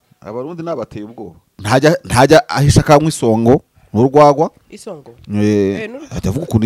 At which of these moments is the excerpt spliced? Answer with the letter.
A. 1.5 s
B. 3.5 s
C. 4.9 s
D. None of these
A